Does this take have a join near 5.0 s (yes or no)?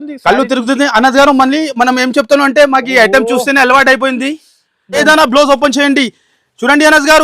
yes